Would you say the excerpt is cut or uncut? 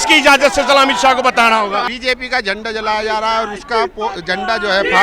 cut